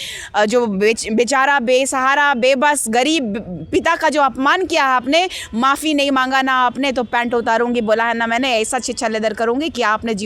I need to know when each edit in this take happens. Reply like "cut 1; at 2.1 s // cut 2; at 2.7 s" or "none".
none